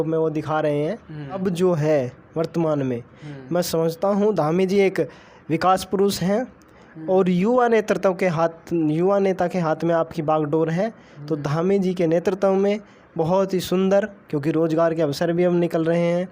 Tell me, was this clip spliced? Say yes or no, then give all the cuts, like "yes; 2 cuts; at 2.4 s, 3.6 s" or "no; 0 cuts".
yes; 1 cut; at 1.4 s